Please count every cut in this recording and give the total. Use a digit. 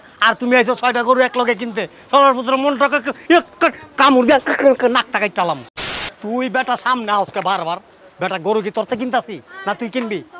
1